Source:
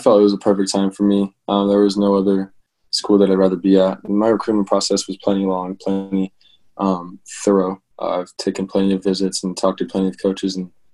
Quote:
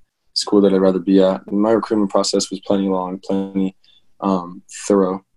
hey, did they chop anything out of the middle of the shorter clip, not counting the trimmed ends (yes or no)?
no